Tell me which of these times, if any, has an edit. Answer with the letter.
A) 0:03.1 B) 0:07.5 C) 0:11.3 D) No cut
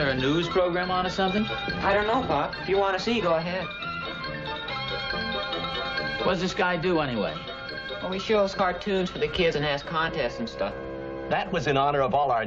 A